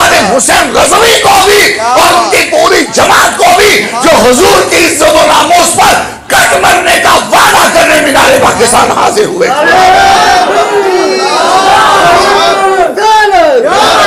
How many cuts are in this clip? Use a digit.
0